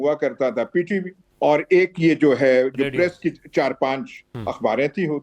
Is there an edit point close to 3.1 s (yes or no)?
no